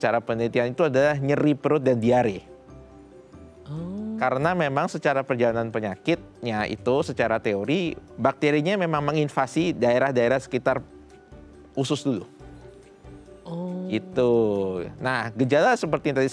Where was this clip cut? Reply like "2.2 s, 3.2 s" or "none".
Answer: none